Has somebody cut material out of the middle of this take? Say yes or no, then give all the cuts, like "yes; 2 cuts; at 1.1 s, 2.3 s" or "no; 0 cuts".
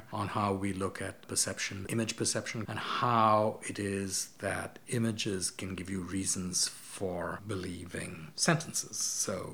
yes; 3 cuts; at 1.9 s, 2.7 s, 8.2 s